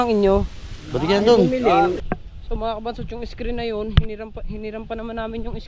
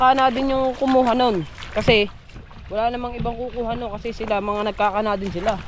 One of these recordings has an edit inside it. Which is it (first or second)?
first